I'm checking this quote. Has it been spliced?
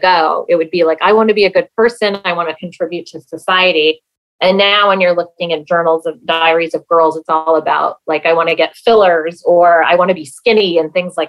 no; 0 cuts

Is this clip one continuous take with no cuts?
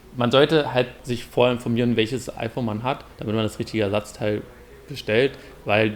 no; 2 cuts; at 1.0 s, 2.3 s

